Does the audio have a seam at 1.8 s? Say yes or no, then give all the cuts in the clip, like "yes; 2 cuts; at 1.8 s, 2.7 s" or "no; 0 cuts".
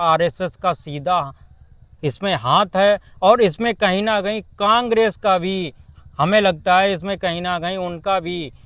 no; 0 cuts